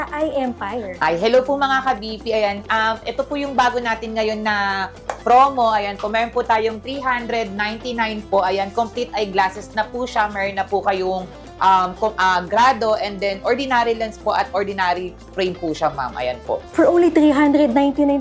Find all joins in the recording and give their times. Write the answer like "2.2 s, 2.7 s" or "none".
none